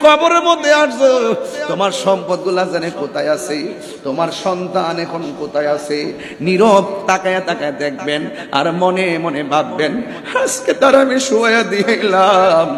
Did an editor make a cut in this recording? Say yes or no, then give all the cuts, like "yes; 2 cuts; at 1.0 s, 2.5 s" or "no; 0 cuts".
no; 0 cuts